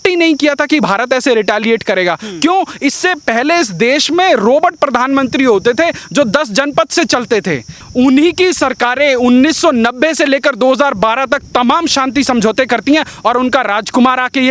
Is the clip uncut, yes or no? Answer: no